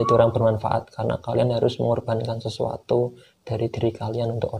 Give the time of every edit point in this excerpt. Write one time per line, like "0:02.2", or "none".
none